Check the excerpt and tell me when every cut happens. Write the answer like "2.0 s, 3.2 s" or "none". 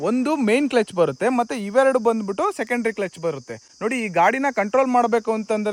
none